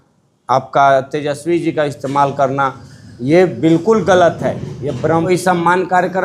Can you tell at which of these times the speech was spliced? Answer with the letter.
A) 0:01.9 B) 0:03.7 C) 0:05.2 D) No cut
C